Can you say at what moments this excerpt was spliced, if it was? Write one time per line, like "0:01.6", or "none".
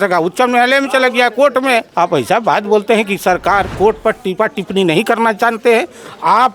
0:01.9
0:03.7